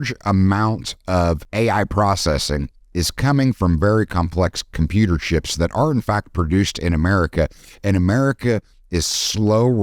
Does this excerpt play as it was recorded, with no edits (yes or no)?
no